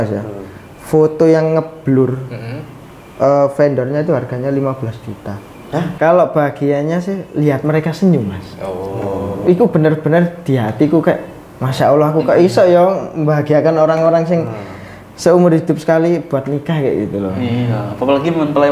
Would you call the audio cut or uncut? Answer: cut